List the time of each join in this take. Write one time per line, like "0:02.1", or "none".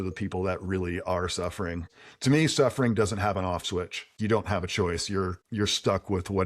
0:01.8
0:04.1
0:05.4